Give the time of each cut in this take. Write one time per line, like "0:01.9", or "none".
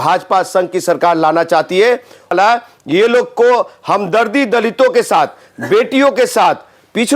0:02.3